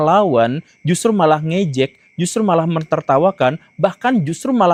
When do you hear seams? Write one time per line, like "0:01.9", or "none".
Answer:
none